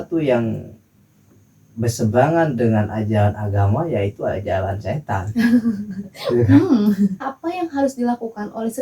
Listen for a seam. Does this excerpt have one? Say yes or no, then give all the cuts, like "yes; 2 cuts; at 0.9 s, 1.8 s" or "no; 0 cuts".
yes; 1 cut; at 7.3 s